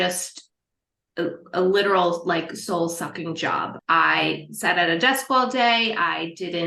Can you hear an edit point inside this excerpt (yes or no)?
no